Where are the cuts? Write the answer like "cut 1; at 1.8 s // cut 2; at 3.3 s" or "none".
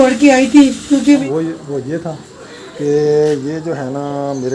cut 1; at 1.2 s